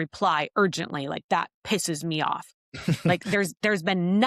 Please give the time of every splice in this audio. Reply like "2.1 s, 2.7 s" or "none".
none